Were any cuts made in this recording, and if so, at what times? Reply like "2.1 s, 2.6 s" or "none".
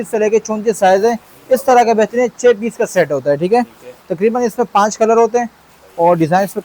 none